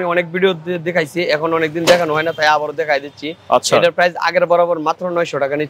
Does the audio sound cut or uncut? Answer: uncut